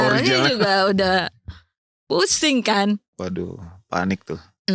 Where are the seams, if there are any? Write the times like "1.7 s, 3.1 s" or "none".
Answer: none